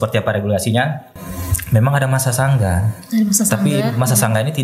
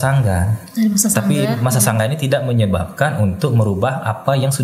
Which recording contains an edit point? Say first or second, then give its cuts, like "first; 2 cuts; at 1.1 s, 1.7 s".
first; 1 cut; at 1.2 s